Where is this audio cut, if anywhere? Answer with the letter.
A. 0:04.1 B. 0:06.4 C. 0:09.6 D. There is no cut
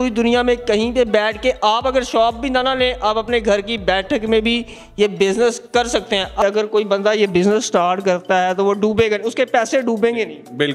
B